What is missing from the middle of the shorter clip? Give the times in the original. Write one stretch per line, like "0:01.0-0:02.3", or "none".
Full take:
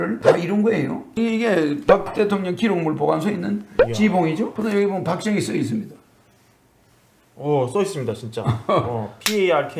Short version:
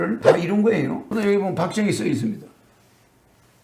0:01.1-0:04.5